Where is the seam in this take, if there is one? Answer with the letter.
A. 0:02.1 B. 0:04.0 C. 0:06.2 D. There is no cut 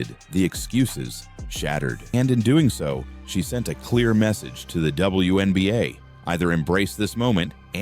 A